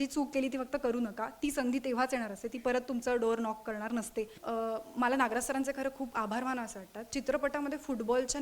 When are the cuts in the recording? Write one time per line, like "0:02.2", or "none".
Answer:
0:04.4